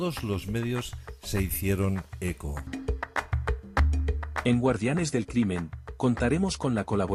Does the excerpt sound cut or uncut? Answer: uncut